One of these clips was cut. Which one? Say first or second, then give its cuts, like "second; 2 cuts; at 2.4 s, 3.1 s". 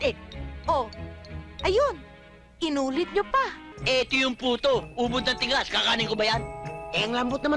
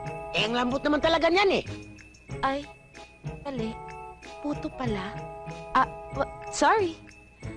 first; 1 cut; at 3.7 s